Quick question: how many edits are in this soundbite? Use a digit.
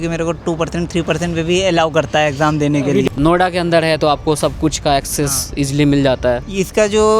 1